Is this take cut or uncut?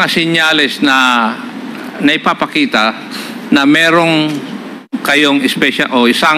uncut